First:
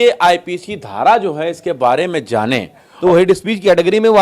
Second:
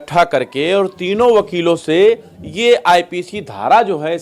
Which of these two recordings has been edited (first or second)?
first